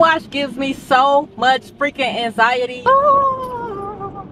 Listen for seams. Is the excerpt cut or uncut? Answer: cut